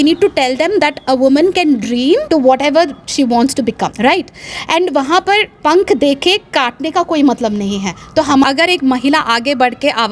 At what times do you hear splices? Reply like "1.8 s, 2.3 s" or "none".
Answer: 2.2 s, 3.9 s, 8.4 s